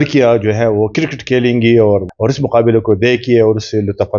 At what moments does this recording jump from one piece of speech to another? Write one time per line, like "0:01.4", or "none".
0:02.1